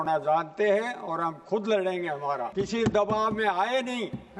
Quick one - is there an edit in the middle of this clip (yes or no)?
yes